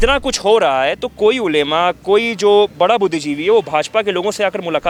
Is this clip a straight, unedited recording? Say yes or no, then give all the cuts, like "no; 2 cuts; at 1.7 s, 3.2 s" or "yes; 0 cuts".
yes; 0 cuts